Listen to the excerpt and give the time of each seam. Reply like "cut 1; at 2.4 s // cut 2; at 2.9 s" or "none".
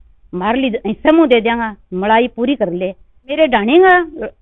cut 1; at 3.3 s